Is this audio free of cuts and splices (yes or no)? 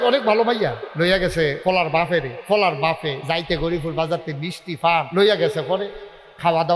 no